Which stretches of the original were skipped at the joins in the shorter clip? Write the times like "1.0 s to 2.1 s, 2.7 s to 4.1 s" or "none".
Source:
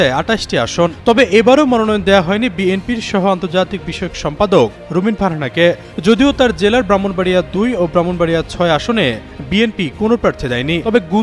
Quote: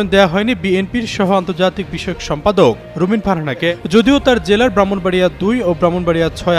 5.6 s to 5.8 s